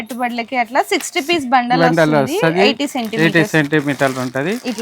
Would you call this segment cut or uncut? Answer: uncut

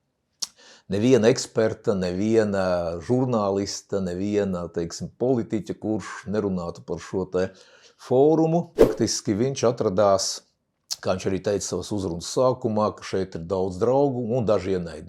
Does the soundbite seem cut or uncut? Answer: cut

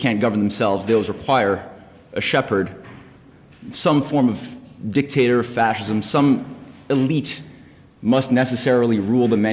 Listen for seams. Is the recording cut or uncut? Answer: cut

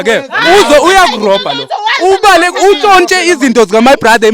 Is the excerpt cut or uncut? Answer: uncut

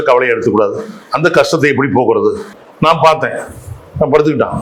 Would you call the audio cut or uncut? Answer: uncut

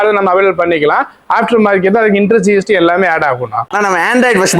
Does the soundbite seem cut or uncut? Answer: uncut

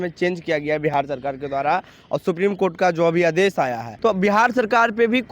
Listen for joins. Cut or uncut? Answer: cut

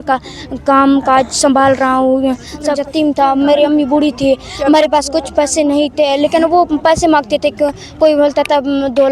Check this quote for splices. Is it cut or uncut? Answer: cut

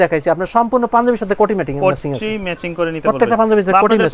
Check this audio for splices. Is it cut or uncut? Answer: uncut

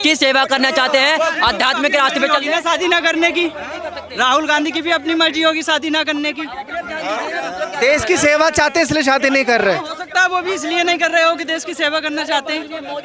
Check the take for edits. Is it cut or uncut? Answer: uncut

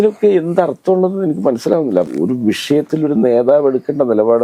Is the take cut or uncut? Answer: uncut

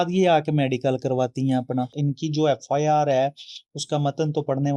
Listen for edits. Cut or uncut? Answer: cut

